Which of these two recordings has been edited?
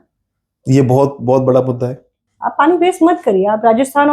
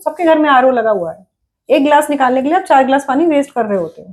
first; 1 cut; at 2.3 s

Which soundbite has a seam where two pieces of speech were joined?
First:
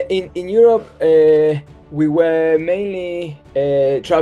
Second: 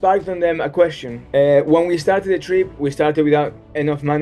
second; 1 cut; at 1.1 s

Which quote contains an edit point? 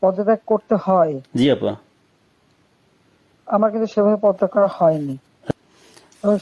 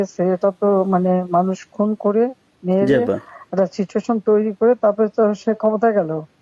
first; 1 cut; at 5.5 s

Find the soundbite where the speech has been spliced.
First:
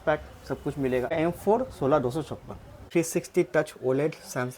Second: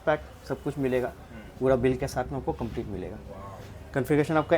first; 2 cuts; at 1.1 s, 2.9 s

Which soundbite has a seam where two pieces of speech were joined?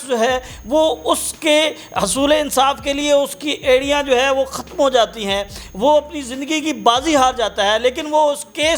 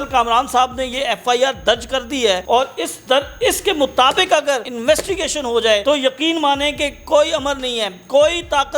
second; 3 cuts; at 2.4 s, 4.7 s, 5.8 s

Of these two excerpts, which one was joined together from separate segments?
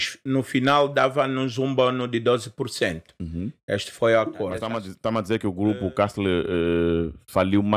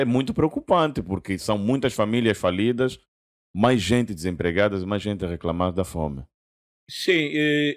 first; 1 cut; at 4.6 s

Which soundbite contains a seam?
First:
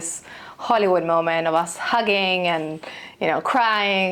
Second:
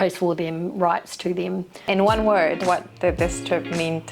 second; 2 cuts; at 1.7 s, 2.6 s

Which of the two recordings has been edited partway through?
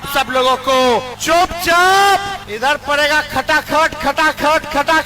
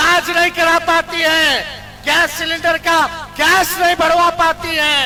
first; 2 cuts; at 1.1 s, 2.4 s

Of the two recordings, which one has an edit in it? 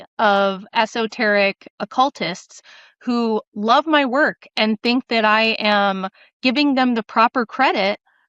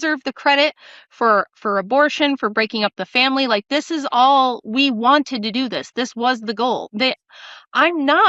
first; 1 cut; at 1.7 s

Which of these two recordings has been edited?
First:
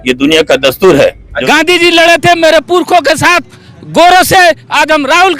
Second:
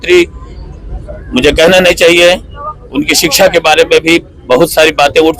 first; 1 cut; at 1.4 s

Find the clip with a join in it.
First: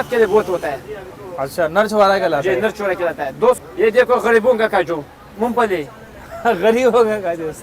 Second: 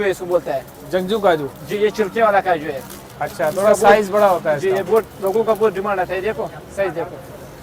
first; 1 cut; at 3.6 s

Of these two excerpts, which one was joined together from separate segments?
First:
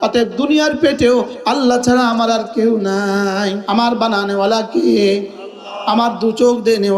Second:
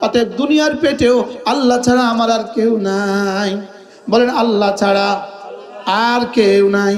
first; 1 cut; at 3.6 s

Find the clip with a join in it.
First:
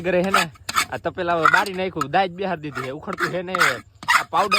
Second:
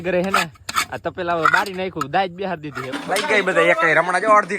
second; 1 cut; at 3.0 s

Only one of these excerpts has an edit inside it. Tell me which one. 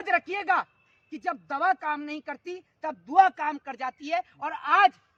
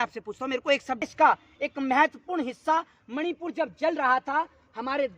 second; 1 cut; at 1.0 s

